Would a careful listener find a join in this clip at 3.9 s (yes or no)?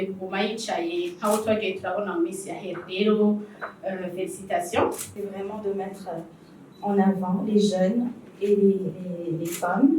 no